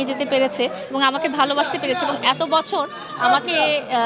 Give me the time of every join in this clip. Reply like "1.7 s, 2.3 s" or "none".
none